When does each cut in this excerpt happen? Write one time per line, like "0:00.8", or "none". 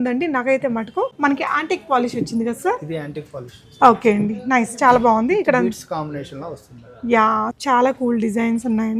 0:01.1
0:07.5